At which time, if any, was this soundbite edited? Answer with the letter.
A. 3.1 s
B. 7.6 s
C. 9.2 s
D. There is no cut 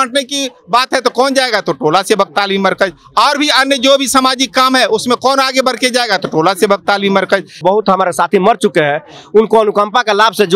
B